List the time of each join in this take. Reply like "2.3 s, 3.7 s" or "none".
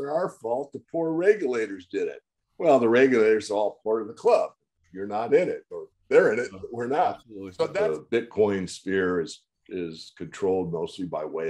7.7 s